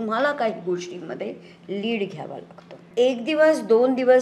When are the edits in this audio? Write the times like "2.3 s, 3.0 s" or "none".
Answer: 2.8 s